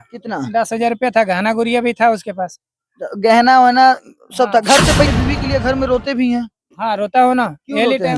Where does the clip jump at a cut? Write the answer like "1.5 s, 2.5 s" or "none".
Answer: 5.1 s